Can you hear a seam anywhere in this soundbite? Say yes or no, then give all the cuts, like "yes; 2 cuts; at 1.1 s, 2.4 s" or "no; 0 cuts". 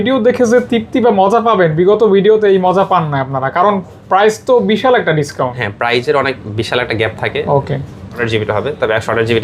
yes; 1 cut; at 8.2 s